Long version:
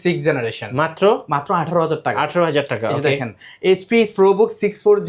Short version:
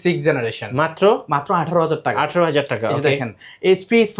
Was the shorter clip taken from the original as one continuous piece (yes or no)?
yes